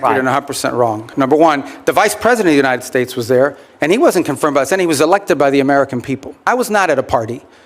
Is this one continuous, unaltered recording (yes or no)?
no